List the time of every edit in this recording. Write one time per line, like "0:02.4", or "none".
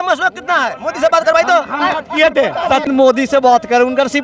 0:02.8